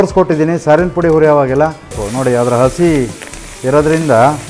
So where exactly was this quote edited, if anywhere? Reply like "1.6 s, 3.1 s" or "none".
2.0 s